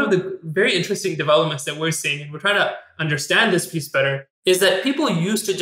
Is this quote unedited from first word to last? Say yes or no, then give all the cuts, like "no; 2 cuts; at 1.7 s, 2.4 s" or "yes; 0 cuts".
no; 1 cut; at 4.3 s